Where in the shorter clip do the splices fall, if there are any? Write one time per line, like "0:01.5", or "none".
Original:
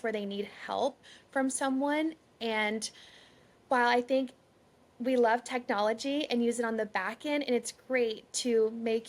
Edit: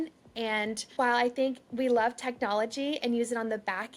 0:00.8
0:01.6